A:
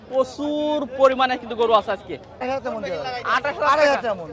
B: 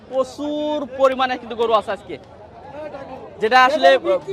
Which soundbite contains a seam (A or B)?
A